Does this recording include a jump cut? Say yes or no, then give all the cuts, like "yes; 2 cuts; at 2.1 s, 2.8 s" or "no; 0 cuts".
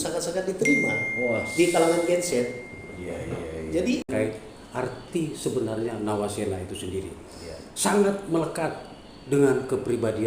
yes; 1 cut; at 4.1 s